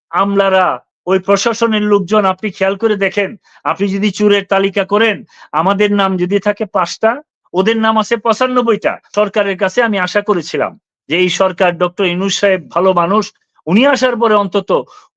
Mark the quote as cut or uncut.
cut